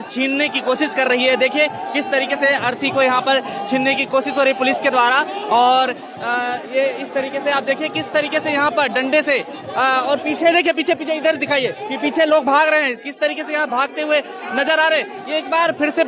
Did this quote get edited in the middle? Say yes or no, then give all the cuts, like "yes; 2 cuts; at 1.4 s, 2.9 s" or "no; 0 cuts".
no; 0 cuts